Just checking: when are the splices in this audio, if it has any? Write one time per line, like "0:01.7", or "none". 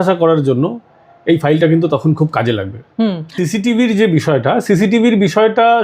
0:03.3